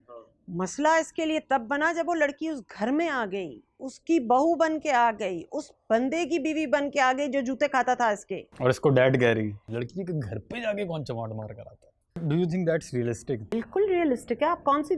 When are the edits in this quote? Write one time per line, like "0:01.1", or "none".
0:09.6
0:12.2
0:13.5